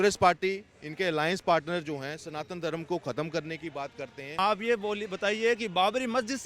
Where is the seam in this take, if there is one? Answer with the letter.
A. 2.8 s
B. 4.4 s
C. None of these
B